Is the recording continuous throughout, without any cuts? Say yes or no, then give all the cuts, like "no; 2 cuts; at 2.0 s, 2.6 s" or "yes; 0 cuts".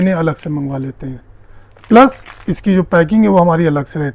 yes; 0 cuts